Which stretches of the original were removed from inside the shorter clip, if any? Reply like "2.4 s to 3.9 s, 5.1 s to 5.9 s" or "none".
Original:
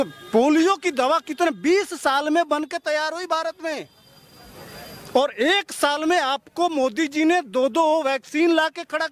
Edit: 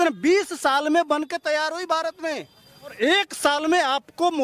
4.4 s to 5.3 s